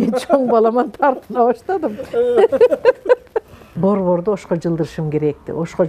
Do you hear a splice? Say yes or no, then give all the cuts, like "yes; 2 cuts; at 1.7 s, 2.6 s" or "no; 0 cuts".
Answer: yes; 1 cut; at 3.7 s